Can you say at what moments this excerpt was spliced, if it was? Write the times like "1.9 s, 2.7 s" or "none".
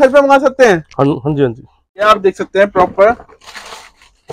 2.0 s